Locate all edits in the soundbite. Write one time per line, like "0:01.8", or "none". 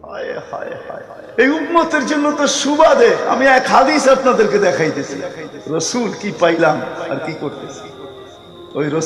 0:01.3